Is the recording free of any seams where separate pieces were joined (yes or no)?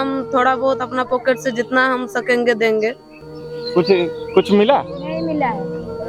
yes